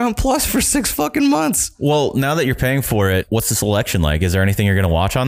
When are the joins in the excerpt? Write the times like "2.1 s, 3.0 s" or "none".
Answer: 1.7 s, 3.3 s